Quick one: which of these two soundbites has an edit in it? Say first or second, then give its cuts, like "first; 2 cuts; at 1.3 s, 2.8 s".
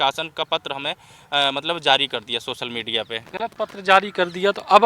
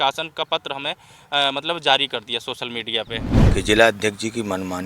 second; 1 cut; at 3.2 s